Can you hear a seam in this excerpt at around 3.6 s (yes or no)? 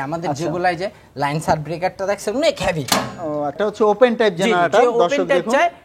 yes